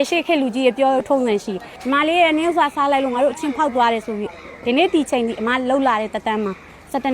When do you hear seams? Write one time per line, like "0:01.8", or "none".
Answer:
0:01.7